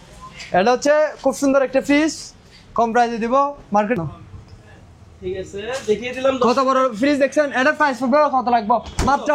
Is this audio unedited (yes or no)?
no